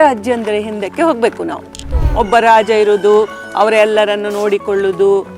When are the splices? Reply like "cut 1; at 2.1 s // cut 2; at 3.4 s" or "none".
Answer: cut 1; at 2.0 s